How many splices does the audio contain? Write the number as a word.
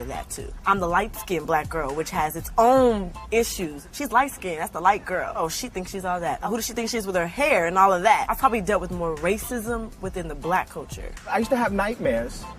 one